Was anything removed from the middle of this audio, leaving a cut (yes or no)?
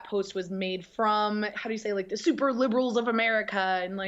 yes